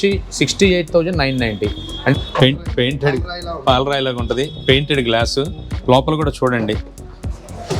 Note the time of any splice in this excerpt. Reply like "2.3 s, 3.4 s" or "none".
2.1 s